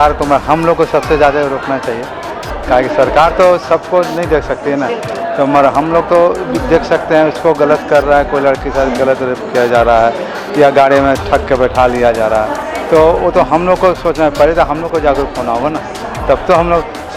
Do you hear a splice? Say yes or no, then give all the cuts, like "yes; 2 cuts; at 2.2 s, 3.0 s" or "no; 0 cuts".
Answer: no; 0 cuts